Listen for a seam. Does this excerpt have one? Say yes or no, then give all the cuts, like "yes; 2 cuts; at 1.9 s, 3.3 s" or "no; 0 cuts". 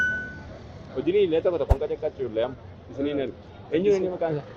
no; 0 cuts